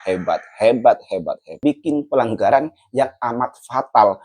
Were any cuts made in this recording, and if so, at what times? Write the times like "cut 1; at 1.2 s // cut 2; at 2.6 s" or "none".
cut 1; at 1.5 s